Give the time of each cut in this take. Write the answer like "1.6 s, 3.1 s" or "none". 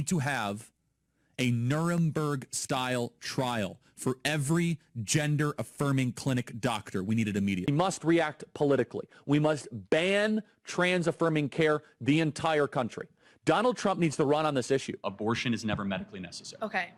none